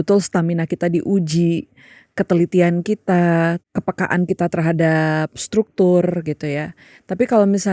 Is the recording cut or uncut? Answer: cut